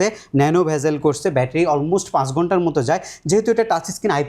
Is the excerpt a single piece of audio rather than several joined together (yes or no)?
yes